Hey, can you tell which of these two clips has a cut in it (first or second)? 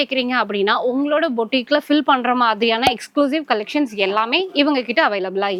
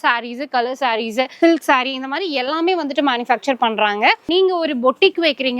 second